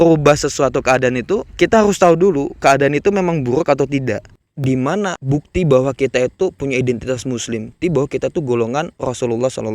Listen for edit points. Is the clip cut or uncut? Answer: cut